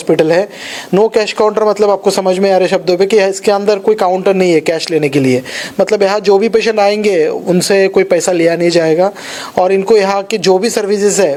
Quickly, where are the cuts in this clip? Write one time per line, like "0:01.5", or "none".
none